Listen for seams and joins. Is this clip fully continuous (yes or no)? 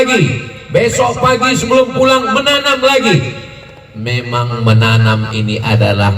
yes